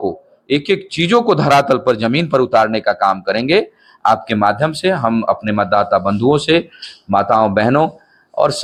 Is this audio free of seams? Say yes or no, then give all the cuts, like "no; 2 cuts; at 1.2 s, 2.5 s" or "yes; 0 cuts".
yes; 0 cuts